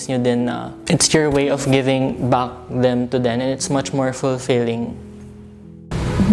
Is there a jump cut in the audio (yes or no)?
no